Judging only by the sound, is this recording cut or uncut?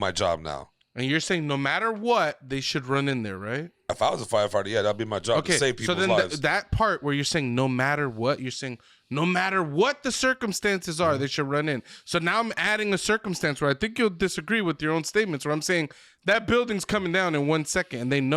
uncut